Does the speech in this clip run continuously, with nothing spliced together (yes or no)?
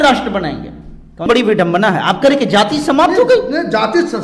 no